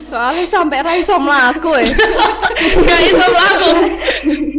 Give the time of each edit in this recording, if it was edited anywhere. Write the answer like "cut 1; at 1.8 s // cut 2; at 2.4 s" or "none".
none